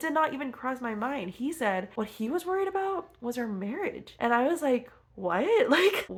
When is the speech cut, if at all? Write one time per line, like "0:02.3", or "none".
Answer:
none